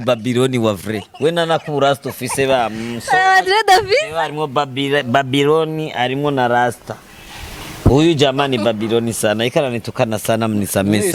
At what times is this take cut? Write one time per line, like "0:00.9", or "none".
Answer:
none

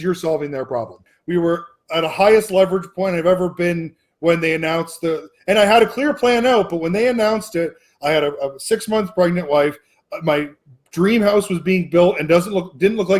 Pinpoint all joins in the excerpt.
0:01.1

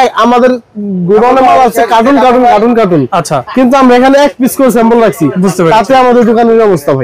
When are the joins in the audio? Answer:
none

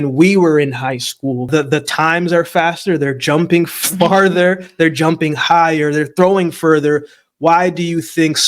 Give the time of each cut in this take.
0:01.5

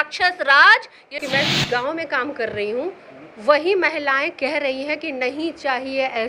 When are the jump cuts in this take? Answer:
0:01.1

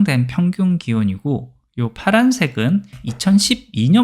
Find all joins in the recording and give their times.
0:03.0

